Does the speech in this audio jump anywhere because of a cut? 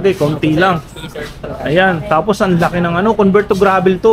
no; 0 cuts

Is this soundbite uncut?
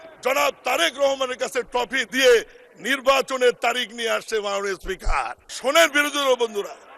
no; 1 cut; at 5.4 s

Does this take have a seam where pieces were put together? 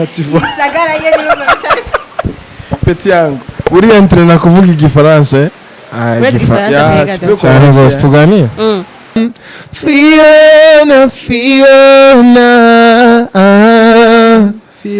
yes; 1 cut; at 9.2 s

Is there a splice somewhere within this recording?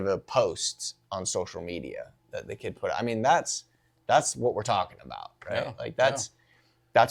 no; 0 cuts

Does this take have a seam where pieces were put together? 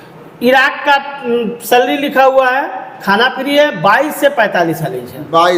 no; 0 cuts

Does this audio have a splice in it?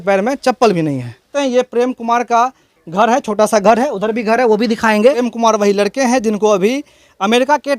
yes; 2 cuts; at 1.2 s, 5.3 s

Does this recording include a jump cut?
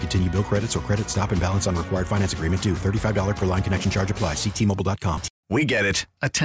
yes; 1 cut; at 5.3 s

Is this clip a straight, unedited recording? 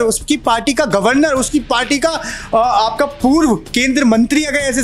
yes; 0 cuts

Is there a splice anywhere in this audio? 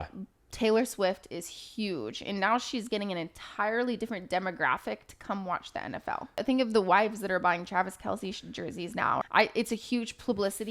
yes; 2 cuts; at 6.4 s, 9.2 s

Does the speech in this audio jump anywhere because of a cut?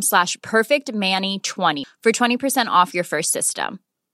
yes; 1 cut; at 1.8 s

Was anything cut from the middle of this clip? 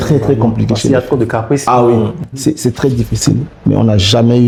no; 0 cuts

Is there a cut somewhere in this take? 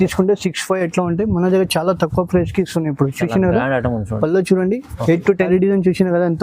yes; 1 cut; at 5.5 s

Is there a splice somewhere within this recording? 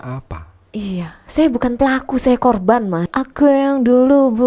yes; 1 cut; at 3.1 s

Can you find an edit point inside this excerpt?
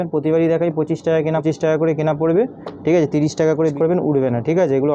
yes; 2 cuts; at 1.4 s, 3.7 s

